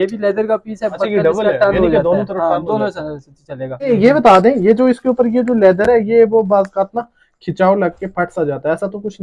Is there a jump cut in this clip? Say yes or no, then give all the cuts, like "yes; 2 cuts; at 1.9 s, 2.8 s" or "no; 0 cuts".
yes; 1 cut; at 3.9 s